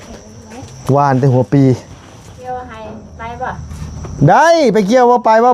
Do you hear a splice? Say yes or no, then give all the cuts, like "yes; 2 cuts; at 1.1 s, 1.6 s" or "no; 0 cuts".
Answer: yes; 1 cut; at 2.5 s